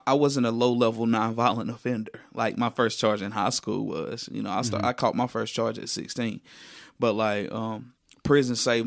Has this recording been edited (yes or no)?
no